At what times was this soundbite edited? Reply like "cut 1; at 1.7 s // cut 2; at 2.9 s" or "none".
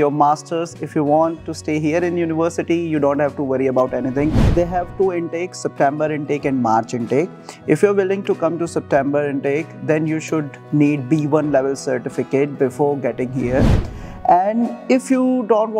cut 1; at 4.5 s // cut 2; at 13.9 s